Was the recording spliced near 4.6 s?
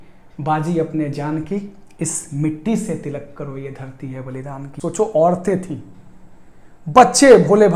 yes; 1 cut; at 4.6 s

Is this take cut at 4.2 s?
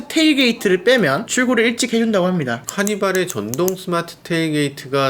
no; 2 cuts; at 1.3 s, 2.7 s

